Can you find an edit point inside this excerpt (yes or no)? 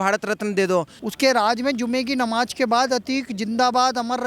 yes